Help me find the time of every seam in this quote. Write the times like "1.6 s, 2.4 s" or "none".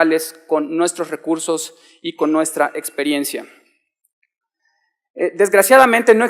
2.5 s